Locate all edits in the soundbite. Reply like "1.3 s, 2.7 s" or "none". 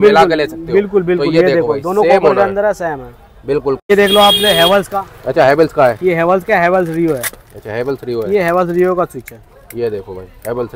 3.9 s

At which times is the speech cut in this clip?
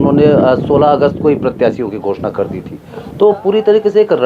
none

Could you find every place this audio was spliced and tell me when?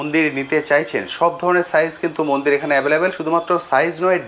none

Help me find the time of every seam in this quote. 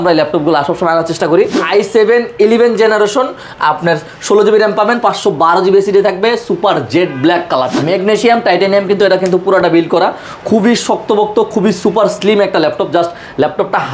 1.6 s, 7.7 s

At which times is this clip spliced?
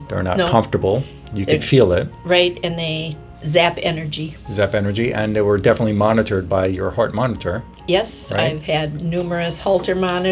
none

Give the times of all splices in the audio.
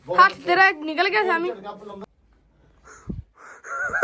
1.9 s

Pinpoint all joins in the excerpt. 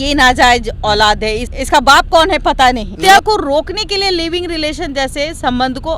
3.0 s

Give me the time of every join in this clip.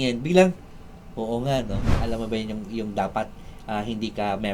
2.0 s

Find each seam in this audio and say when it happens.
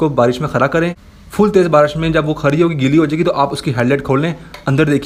none

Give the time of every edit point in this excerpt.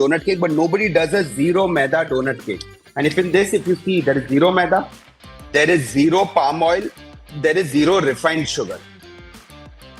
none

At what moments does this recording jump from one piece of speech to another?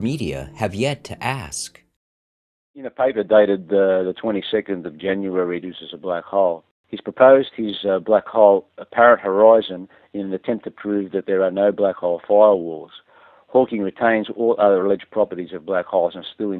none

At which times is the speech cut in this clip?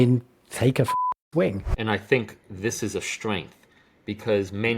1.6 s

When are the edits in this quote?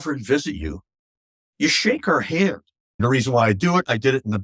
3.0 s

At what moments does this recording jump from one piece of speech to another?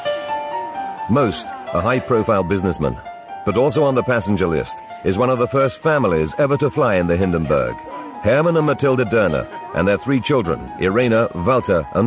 1.0 s

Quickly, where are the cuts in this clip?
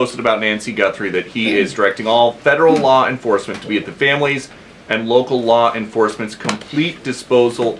none

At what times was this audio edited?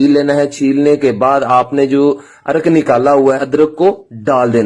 3.4 s

